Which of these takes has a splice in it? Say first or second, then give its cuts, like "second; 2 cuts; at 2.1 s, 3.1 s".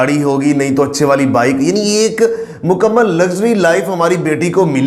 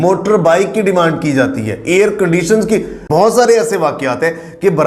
second; 1 cut; at 2.9 s